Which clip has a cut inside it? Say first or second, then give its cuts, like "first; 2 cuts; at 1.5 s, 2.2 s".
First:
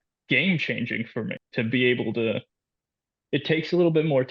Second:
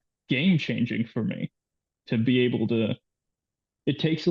first; 1 cut; at 1.4 s